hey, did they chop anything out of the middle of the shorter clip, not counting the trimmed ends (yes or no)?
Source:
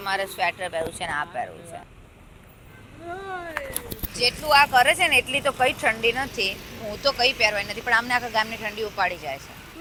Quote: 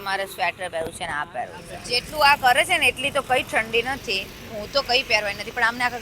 yes